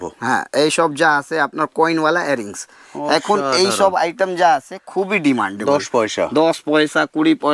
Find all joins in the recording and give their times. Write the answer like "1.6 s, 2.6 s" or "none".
none